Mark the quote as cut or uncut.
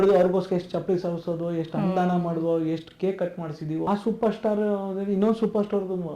cut